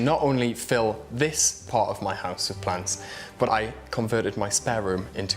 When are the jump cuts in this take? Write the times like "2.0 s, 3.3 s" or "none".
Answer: 3.5 s